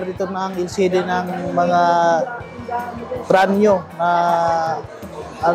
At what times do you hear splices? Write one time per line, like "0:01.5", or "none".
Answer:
none